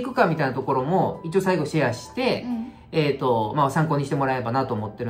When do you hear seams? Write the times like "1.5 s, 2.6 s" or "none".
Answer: none